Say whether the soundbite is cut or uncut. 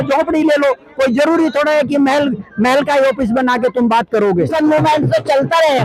cut